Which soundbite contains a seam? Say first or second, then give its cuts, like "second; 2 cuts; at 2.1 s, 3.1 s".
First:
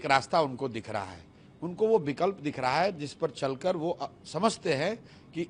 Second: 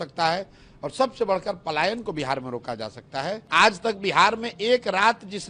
second; 1 cut; at 3.4 s